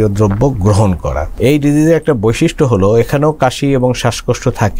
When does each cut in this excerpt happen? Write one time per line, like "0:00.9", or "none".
0:01.3

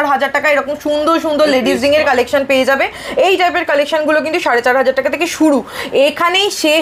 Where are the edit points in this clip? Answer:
none

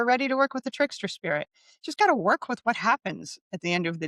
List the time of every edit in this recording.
none

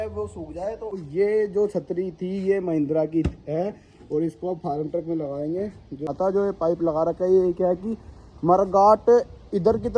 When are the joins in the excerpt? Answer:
0:00.9
0:06.1

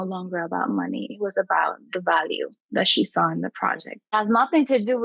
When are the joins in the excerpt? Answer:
0:04.1

